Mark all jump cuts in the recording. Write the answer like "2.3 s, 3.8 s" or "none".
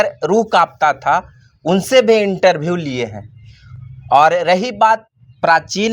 none